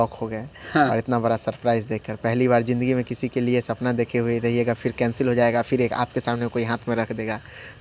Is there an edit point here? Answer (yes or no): no